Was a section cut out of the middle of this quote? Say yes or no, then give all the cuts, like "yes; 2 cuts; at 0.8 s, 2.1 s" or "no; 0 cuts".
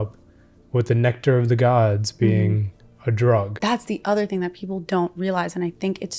yes; 1 cut; at 3.5 s